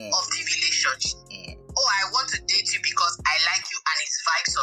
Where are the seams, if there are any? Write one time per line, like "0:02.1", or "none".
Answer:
none